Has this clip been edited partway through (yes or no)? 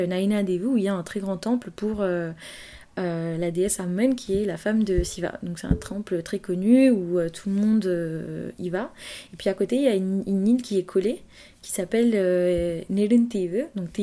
no